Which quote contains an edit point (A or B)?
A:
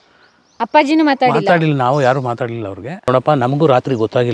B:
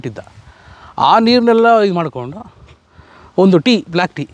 A